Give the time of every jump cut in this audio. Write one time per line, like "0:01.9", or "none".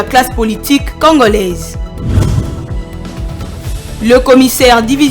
0:01.7